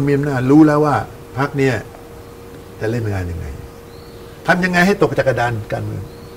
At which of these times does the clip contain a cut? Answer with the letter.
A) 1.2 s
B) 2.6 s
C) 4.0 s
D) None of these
A